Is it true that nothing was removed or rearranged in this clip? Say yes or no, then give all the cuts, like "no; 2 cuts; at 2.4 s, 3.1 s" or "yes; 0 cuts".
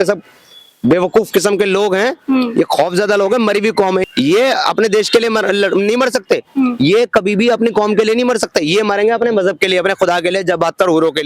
yes; 0 cuts